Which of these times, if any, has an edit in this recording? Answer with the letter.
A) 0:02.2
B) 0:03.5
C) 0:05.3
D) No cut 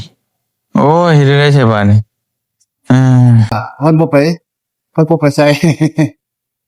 B